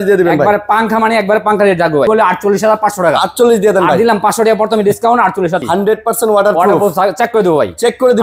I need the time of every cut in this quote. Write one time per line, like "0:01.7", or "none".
0:02.1
0:05.6